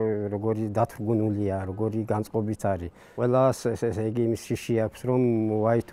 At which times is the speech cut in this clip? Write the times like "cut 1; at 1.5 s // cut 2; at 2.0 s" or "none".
cut 1; at 3.2 s

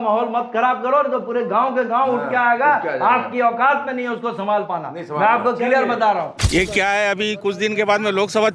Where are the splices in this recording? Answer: cut 1; at 6.4 s

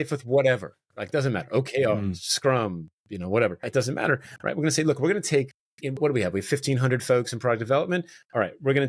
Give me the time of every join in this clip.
none

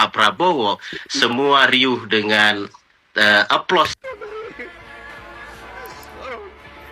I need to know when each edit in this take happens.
cut 1; at 3.9 s

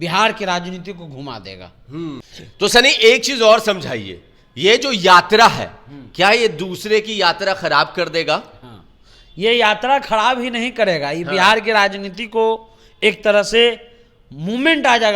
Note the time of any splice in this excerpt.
cut 1; at 2.2 s

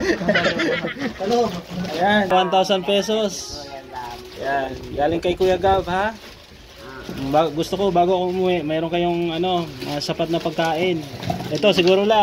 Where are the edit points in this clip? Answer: cut 1; at 2.3 s

